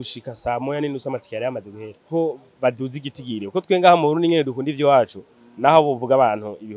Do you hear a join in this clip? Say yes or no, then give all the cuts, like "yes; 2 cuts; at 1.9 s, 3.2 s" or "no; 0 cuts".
yes; 1 cut; at 2.1 s